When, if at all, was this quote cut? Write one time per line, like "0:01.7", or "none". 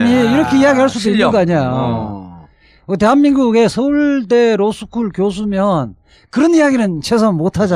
0:04.8